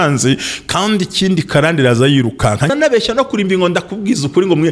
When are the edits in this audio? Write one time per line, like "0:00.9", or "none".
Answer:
0:02.7